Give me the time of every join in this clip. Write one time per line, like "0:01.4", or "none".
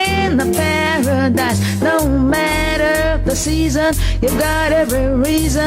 0:04.8